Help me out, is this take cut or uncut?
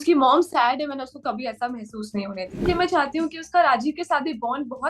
cut